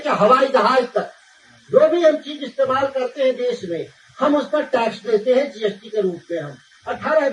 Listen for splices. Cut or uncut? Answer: uncut